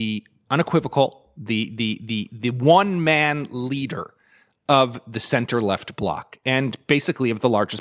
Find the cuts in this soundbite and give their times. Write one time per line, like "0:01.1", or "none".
none